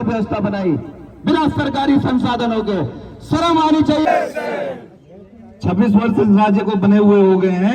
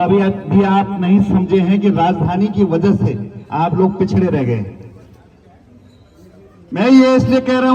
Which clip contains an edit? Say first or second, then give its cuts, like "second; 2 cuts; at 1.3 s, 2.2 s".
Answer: first; 1 cut; at 4.0 s